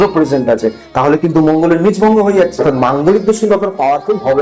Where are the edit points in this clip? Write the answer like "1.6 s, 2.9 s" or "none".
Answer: 2.6 s